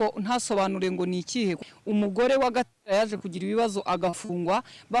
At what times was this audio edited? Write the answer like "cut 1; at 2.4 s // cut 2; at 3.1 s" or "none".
cut 1; at 1.7 s

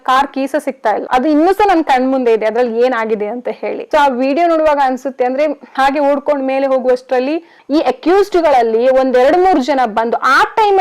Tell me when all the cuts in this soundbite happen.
cut 1; at 1.0 s // cut 2; at 5.6 s // cut 3; at 7.6 s

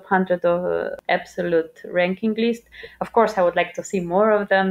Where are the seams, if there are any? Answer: cut 1; at 1.0 s

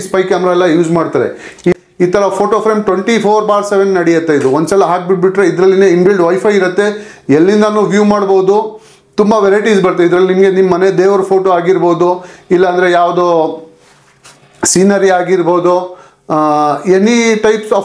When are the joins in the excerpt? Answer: cut 1; at 1.7 s

